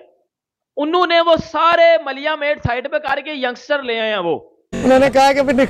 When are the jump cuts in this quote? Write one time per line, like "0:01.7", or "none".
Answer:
0:04.8